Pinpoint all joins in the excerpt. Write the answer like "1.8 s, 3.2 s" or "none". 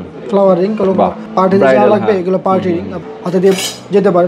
none